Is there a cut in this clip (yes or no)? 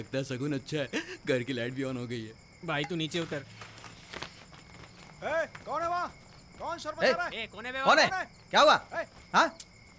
no